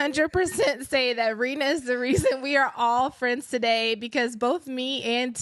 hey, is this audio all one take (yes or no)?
yes